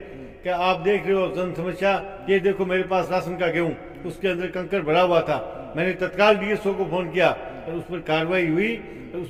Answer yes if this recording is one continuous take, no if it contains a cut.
yes